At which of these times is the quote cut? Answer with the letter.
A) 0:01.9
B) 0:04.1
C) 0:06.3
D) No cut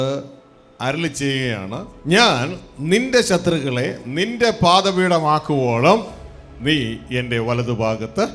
A